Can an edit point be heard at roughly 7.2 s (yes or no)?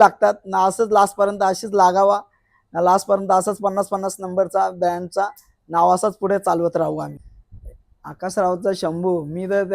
yes